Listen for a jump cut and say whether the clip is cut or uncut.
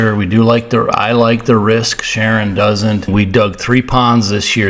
cut